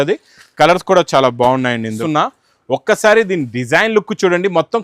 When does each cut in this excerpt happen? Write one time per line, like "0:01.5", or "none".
0:02.0